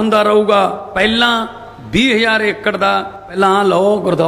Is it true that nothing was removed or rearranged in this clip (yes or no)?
no